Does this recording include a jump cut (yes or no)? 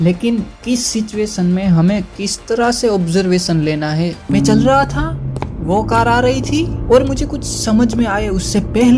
yes